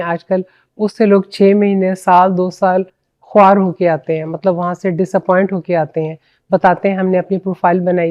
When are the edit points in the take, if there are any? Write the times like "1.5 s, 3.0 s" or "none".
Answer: none